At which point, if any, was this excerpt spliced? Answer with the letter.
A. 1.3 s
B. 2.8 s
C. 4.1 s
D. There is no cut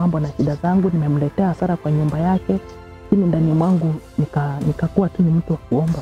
B